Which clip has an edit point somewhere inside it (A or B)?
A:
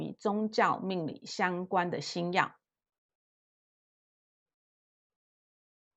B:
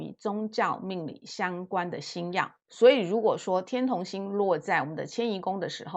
B